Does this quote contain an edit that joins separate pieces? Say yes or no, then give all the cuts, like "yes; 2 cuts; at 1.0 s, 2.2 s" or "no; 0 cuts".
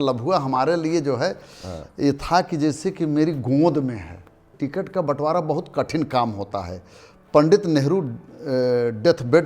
yes; 1 cut; at 4.5 s